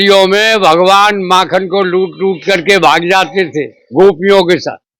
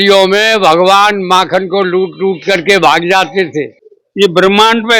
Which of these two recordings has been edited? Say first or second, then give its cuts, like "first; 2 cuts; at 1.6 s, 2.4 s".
second; 1 cut; at 3.8 s